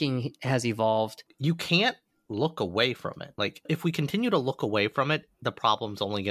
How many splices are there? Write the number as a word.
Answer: two